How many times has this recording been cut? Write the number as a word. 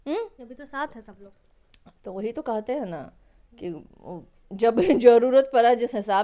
zero